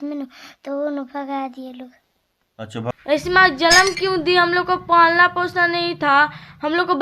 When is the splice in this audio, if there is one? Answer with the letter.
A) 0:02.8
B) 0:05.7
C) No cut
A